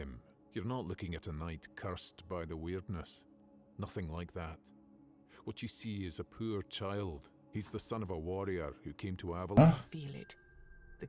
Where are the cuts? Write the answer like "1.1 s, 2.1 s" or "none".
9.6 s